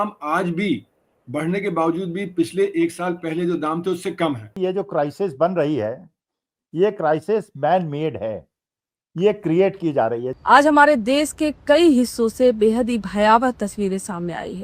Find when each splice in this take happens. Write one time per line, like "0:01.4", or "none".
0:04.5
0:10.3